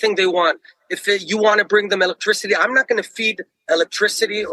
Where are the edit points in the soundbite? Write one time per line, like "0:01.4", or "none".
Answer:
0:02.5

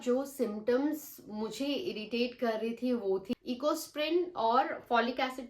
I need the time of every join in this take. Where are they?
0:03.3

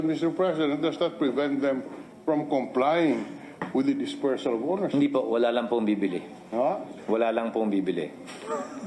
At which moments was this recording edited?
none

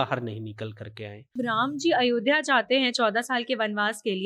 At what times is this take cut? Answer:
0:01.4

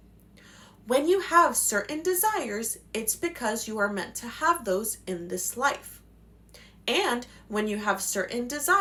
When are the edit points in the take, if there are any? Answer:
none

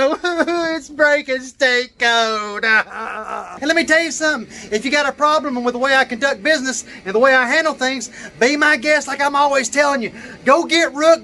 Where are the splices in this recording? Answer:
0:03.5

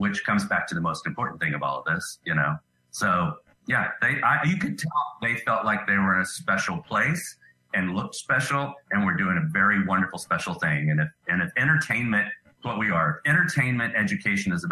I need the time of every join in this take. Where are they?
none

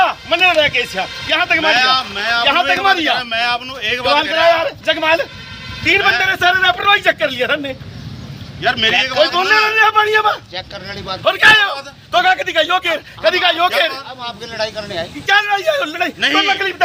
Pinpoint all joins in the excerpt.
none

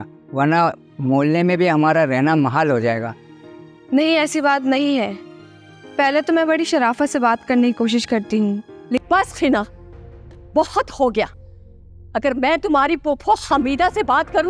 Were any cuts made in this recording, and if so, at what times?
0:09.0

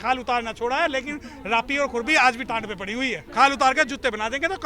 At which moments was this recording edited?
0:03.2

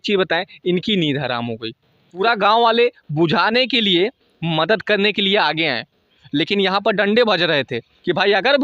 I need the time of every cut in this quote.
0:02.2

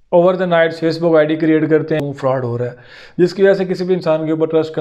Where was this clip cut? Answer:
0:02.0

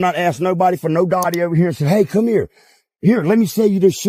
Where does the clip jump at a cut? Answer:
none

